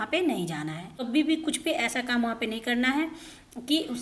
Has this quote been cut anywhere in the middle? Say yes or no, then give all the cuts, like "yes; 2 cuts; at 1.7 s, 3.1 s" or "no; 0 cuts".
yes; 1 cut; at 1.0 s